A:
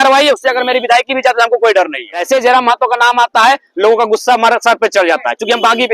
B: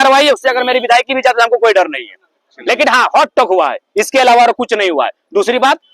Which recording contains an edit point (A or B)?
A